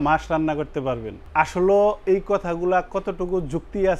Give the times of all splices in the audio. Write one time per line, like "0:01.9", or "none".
0:01.1